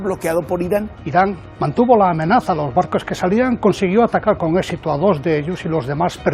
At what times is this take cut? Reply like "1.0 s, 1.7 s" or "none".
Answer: 1.0 s